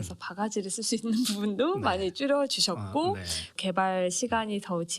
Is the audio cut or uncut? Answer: cut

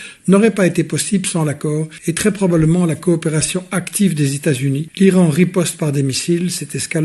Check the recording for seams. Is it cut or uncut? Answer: cut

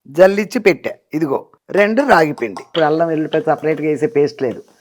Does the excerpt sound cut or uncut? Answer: cut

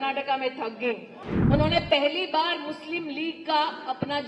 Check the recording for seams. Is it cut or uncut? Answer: cut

